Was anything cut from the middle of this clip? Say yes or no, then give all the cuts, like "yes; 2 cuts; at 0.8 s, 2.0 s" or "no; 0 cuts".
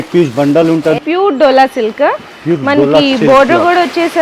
yes; 1 cut; at 1.0 s